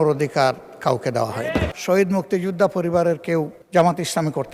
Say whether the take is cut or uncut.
cut